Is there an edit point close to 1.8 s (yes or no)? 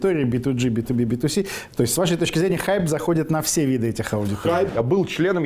no